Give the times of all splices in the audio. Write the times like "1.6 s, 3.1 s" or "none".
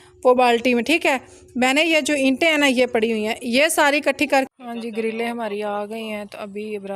4.5 s